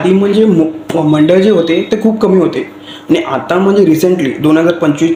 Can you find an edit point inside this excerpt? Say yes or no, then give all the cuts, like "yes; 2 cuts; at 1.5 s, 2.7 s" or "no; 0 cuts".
no; 0 cuts